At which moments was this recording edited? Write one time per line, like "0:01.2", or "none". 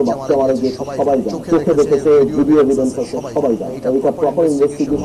0:01.4
0:03.7